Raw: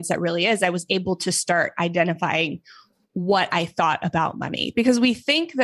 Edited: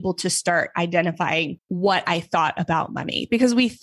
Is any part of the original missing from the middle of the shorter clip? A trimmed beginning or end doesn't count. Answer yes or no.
yes